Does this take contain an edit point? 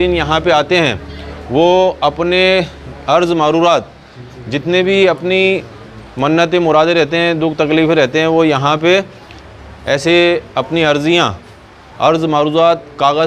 no; 0 cuts

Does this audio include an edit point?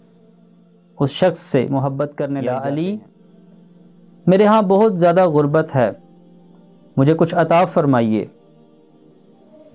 yes; 1 cut; at 2.3 s

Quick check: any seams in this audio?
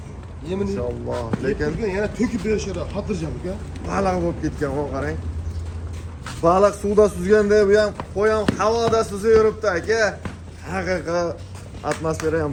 no; 0 cuts

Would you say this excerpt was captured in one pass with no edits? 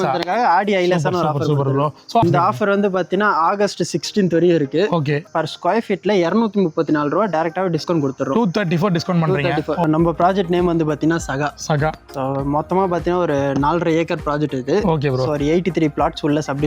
no; 3 cuts; at 2.2 s, 5.3 s, 9.8 s

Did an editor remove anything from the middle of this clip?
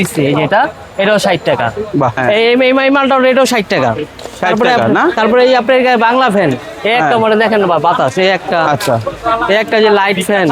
yes; 1 cut; at 2.2 s

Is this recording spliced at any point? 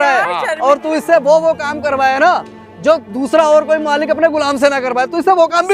no; 0 cuts

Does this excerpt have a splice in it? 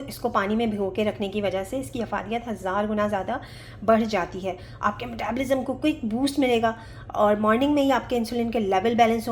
no; 0 cuts

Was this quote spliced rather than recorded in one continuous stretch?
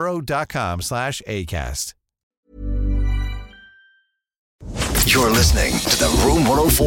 yes; 1 cut; at 4.7 s

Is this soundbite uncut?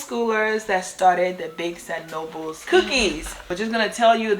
no; 2 cuts; at 2.6 s, 3.4 s

